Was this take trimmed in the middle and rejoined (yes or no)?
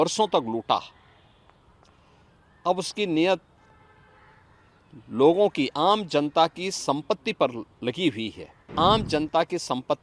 yes